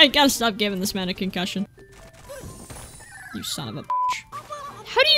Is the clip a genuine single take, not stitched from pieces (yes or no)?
no